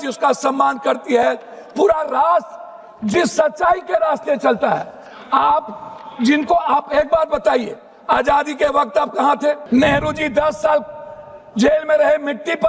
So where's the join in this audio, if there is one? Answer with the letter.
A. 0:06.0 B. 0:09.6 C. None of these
B